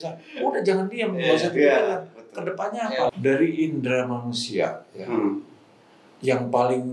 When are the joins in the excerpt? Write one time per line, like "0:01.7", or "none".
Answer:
0:03.1